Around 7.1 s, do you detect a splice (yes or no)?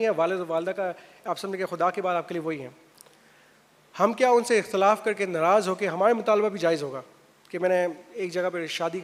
no